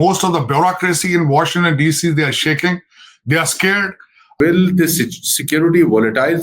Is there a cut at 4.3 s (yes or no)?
yes